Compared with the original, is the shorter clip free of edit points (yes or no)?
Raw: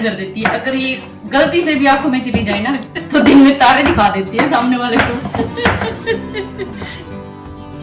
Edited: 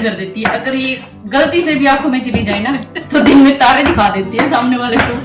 yes